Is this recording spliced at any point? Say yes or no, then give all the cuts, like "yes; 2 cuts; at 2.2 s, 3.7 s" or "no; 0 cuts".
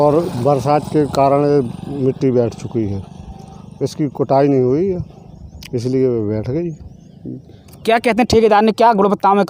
no; 0 cuts